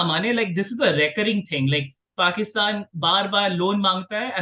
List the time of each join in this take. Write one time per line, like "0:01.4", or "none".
none